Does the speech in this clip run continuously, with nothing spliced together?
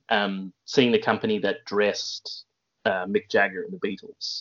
yes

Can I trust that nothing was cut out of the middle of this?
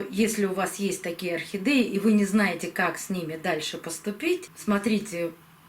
no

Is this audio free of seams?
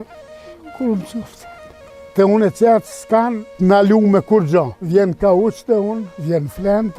no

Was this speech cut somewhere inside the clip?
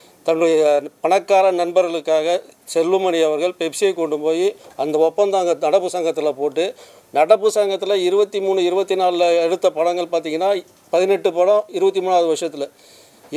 no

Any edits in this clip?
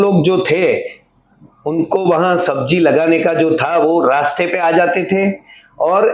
no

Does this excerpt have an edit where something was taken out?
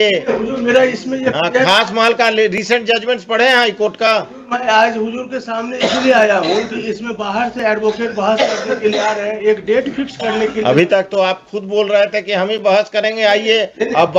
no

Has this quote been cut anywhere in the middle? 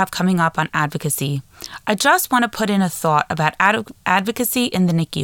no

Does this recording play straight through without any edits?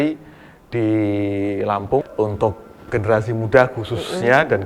no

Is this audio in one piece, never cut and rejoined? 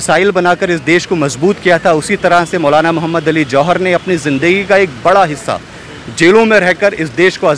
yes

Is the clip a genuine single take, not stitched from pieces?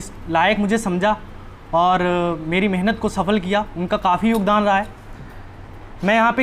yes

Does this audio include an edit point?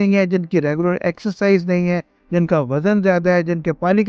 no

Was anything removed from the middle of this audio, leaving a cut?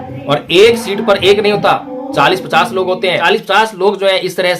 yes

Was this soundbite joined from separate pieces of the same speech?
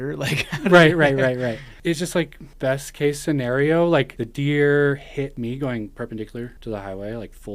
yes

